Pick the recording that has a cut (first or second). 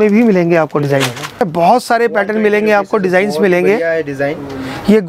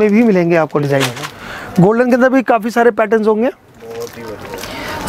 first